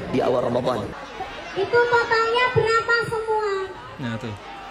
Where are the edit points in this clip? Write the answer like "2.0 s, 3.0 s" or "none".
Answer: 1.0 s